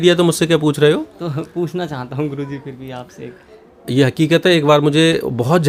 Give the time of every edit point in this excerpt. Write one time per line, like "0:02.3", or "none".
none